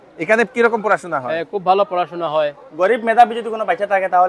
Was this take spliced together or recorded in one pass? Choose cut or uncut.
cut